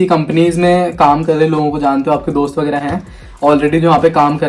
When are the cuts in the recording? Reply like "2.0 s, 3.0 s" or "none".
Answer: none